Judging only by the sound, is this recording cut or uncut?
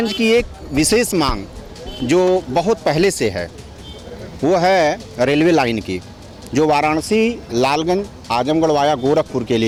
uncut